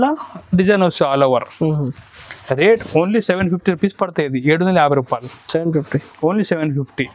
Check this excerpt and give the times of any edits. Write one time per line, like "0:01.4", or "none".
none